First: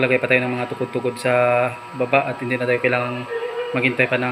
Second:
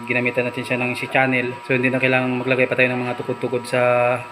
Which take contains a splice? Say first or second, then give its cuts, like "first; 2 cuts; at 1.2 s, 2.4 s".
second; 1 cut; at 1.6 s